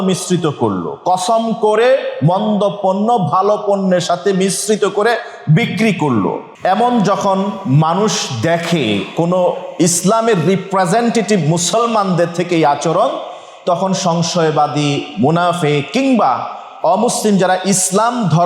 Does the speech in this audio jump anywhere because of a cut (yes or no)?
yes